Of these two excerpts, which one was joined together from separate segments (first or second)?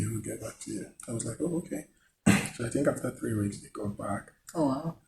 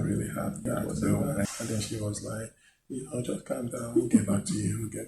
second